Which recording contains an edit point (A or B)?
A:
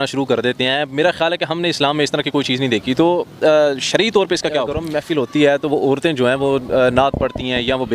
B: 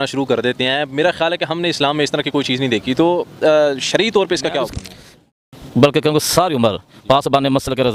A